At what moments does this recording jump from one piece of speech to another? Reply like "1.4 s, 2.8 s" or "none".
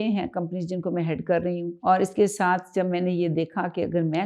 1.7 s